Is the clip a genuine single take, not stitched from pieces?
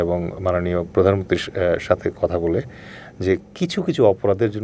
yes; 0 cuts

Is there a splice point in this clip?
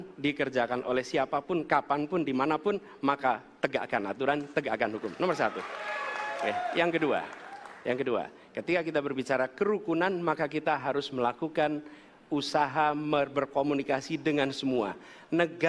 no; 0 cuts

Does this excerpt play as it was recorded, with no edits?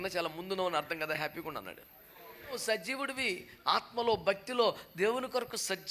no; 1 cut; at 2.5 s

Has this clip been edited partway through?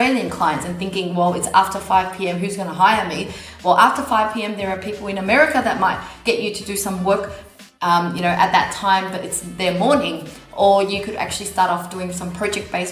no; 0 cuts

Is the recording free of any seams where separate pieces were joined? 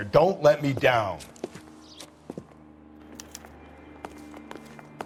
yes; 0 cuts

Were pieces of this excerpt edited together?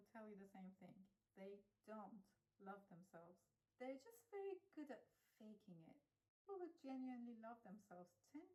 no; 0 cuts

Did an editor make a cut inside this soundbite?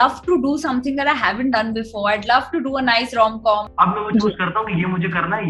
yes; 1 cut; at 3.7 s

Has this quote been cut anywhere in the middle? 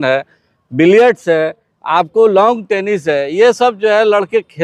no; 0 cuts

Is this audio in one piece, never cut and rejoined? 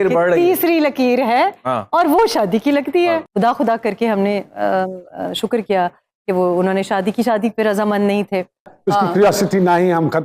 no; 2 cuts; at 3.3 s, 8.7 s

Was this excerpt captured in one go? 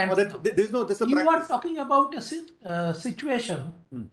yes; 0 cuts

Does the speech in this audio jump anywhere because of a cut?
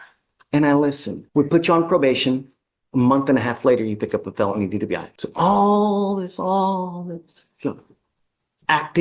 yes; 2 cuts; at 1.1 s, 5.2 s

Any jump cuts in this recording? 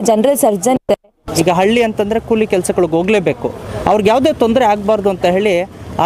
yes; 1 cut; at 1.2 s

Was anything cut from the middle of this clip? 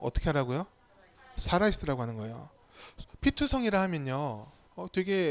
no; 0 cuts

